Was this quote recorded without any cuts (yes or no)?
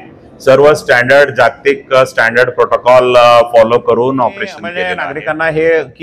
no